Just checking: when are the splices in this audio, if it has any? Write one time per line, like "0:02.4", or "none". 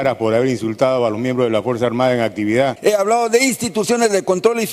0:02.8